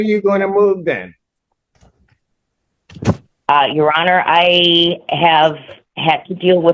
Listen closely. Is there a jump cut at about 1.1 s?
no; 0 cuts

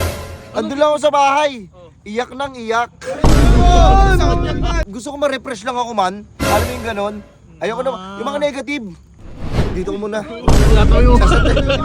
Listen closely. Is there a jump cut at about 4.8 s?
yes; 1 cut; at 4.8 s

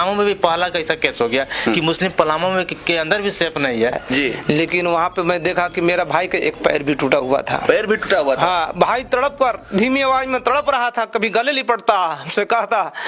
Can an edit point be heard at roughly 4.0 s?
yes; 1 cut; at 4.0 s

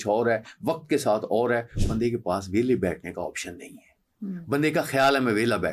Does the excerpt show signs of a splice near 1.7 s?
yes; 1 cut; at 1.7 s

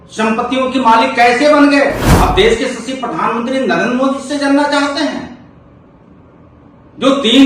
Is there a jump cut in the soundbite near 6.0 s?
no; 1 cut; at 2.1 s

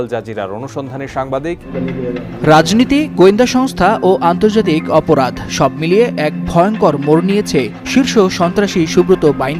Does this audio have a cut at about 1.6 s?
yes; 1 cut; at 1.6 s

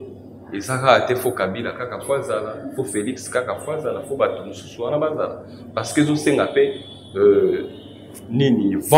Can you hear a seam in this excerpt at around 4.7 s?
no; 0 cuts

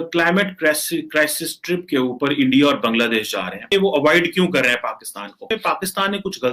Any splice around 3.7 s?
yes; 2 cuts; at 3.7 s, 5.5 s

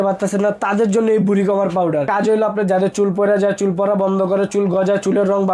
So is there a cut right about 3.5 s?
no; 1 cut; at 2.1 s

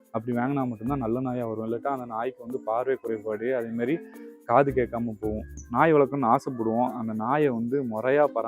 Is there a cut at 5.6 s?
yes; 1 cut; at 5.6 s

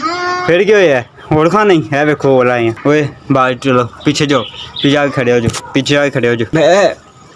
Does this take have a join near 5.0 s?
no; 2 cuts; at 2.8 s, 6.4 s

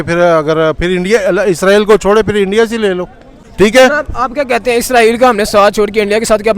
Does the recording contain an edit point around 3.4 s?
yes; 1 cut; at 3.4 s

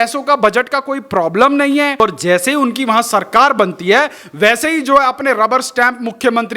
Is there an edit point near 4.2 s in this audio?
no; 1 cut; at 2.0 s

